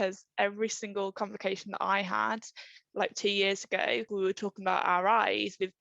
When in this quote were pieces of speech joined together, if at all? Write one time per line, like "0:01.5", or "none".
0:04.1